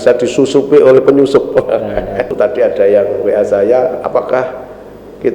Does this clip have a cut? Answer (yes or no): yes